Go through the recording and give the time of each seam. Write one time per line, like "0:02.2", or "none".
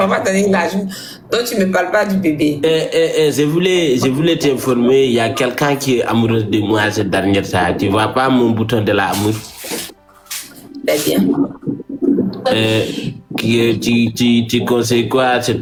none

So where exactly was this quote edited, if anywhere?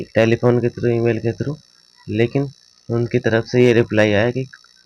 none

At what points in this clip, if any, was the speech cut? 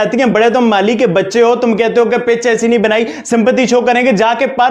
none

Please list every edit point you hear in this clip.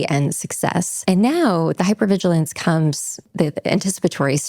0:00.9
0:03.3

